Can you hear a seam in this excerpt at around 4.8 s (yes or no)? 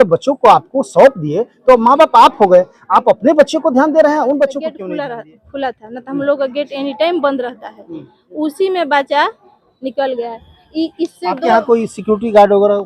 yes